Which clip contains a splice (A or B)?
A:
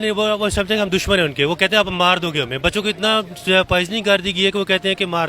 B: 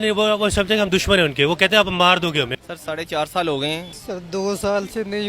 B